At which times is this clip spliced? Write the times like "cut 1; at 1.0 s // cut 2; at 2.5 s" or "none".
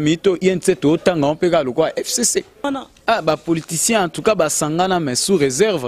cut 1; at 2.7 s